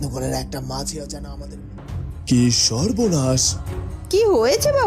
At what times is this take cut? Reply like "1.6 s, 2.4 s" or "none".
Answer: 1.8 s